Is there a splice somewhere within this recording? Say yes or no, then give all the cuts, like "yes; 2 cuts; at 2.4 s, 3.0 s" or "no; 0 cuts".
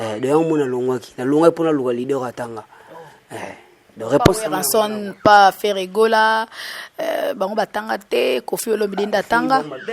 no; 0 cuts